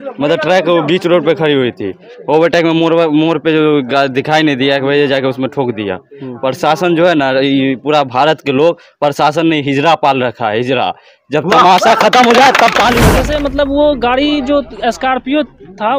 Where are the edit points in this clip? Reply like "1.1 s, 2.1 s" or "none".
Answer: 13.2 s